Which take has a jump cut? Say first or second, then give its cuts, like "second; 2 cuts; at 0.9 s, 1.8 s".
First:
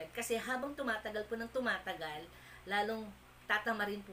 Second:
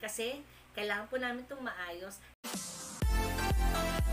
second; 1 cut; at 2.3 s